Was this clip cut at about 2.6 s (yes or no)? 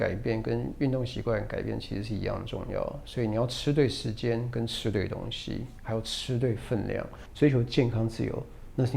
no